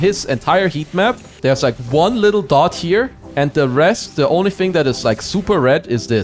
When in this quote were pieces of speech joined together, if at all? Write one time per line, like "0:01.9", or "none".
0:01.3